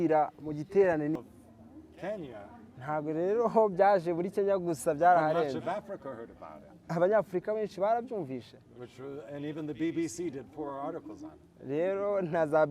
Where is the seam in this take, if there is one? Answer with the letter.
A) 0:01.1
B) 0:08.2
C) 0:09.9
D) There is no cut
A